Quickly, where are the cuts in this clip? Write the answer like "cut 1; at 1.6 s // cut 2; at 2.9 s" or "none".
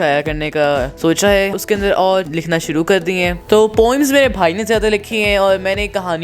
cut 1; at 0.9 s // cut 2; at 1.6 s // cut 3; at 2.3 s // cut 4; at 3.5 s